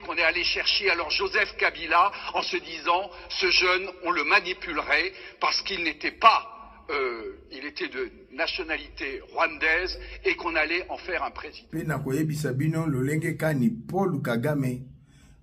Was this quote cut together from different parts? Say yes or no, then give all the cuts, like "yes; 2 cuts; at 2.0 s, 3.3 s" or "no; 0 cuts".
yes; 1 cut; at 11.6 s